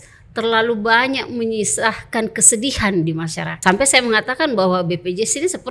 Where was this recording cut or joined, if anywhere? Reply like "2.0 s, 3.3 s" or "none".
3.5 s